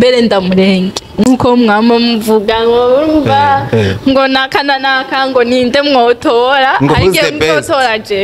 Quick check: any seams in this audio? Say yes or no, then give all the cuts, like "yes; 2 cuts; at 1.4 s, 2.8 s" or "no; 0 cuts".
no; 0 cuts